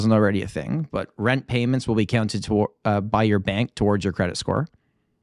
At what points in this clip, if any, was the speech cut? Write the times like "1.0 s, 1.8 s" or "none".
none